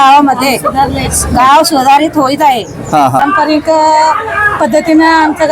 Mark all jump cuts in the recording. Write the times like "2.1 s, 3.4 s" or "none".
3.2 s